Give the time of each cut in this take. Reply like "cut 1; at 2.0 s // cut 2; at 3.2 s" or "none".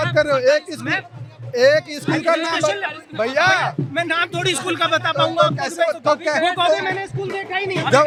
none

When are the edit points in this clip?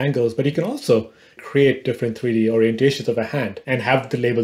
cut 1; at 1.4 s // cut 2; at 3.6 s

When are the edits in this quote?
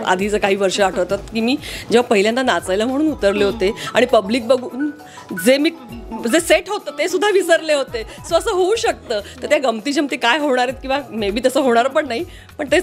none

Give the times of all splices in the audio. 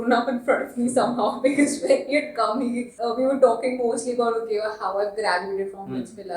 cut 1; at 2.9 s

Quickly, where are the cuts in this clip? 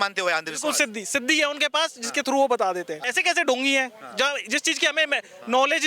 cut 1; at 3.0 s

